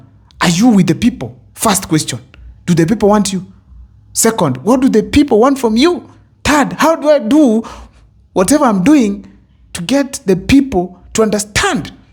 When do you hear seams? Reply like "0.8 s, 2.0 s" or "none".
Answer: none